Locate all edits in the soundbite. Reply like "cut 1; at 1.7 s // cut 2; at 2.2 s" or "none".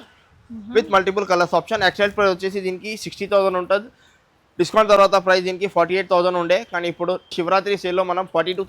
none